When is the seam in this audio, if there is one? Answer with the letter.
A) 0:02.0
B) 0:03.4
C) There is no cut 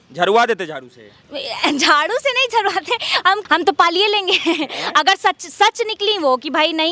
B